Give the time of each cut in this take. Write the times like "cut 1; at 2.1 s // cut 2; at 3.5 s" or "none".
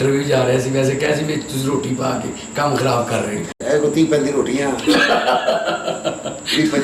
cut 1; at 3.5 s